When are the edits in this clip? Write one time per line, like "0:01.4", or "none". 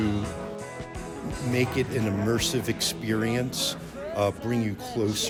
none